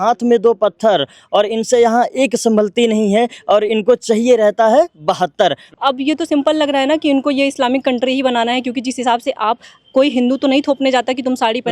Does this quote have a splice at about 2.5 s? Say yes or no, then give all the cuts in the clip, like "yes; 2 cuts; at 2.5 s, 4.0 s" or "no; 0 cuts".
no; 1 cut; at 5.6 s